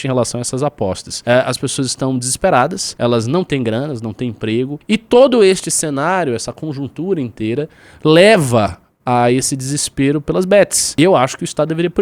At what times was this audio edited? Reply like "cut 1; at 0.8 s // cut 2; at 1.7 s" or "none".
cut 1; at 1.1 s // cut 2; at 2.8 s // cut 3; at 4.8 s // cut 4; at 10.8 s